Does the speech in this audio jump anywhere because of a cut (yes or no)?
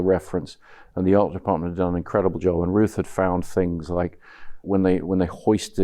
yes